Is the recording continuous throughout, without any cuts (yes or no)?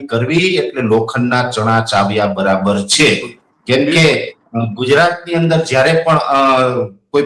yes